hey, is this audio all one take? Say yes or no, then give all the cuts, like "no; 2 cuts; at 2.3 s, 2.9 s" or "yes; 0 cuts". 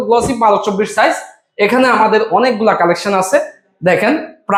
yes; 0 cuts